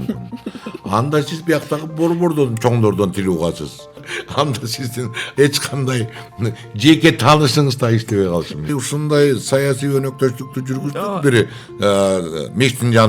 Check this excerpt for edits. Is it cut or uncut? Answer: cut